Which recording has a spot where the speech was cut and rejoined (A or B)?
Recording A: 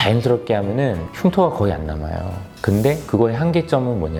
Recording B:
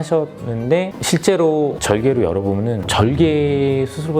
B